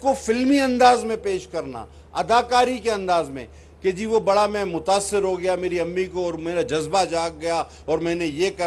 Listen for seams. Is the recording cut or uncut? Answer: uncut